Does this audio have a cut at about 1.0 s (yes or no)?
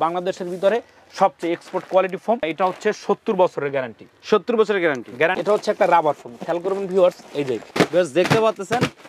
no